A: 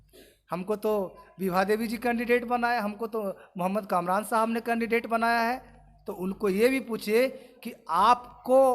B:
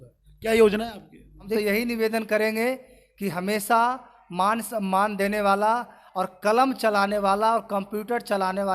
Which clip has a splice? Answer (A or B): B